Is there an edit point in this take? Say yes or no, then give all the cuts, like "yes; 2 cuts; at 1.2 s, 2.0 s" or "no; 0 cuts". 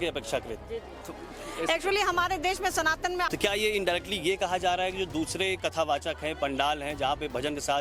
yes; 1 cut; at 3.3 s